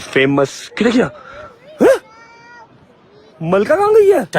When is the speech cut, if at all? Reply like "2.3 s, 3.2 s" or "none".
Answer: none

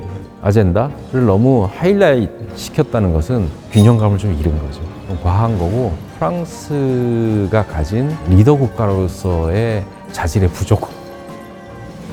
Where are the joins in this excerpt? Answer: none

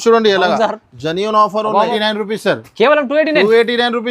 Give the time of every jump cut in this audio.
1.9 s

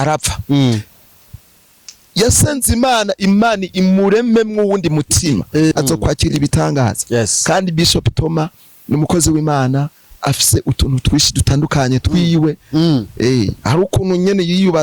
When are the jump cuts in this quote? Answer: 5.7 s

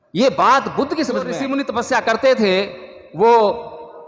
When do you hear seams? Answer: 1.4 s

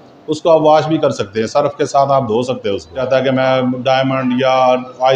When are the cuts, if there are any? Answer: 3.0 s

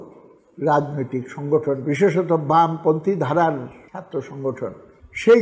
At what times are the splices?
none

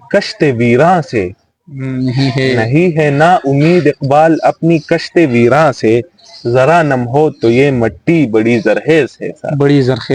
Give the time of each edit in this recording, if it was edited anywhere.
none

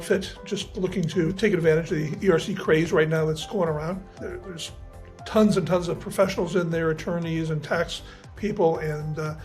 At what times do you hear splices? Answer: 1.3 s, 4.1 s

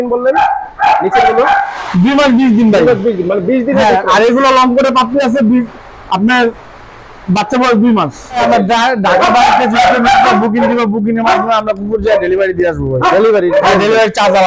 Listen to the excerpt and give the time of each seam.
8.4 s

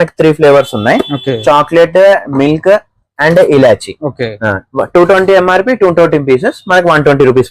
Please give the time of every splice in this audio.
none

